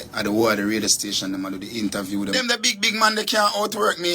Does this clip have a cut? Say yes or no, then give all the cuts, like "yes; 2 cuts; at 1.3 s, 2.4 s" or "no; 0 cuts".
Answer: yes; 1 cut; at 2.3 s